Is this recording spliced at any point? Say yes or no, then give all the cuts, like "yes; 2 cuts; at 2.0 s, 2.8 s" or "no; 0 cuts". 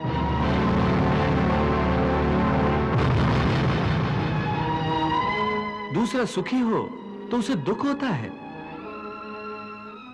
no; 0 cuts